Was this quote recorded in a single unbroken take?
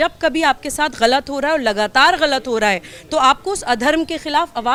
yes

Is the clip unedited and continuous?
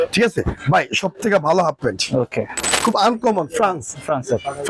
no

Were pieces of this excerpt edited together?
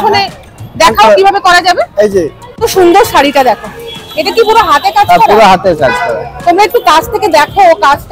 yes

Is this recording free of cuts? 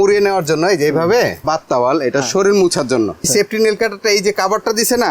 no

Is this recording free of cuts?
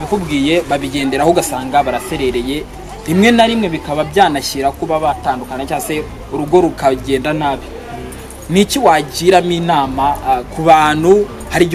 yes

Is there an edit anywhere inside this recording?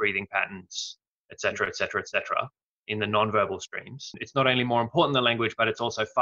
yes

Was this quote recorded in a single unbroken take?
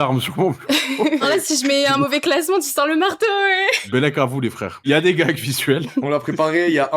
no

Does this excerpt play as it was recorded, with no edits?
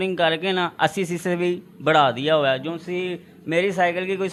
yes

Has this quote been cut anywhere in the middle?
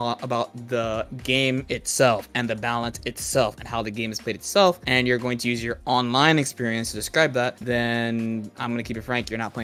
no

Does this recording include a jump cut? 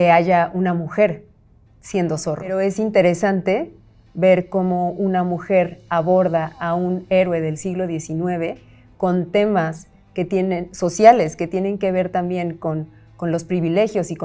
yes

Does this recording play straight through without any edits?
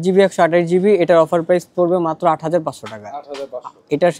yes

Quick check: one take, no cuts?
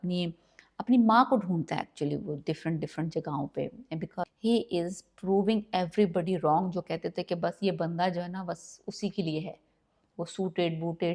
no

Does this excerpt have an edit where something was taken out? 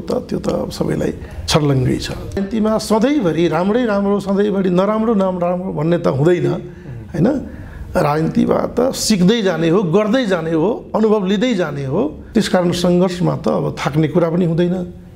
yes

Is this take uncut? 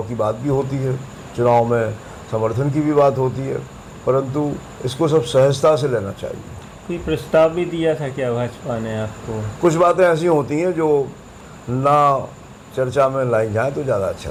yes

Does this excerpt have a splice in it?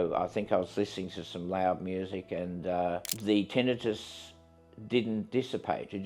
yes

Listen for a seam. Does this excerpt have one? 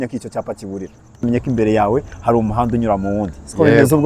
yes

